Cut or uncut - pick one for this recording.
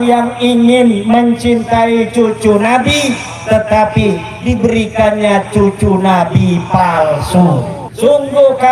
cut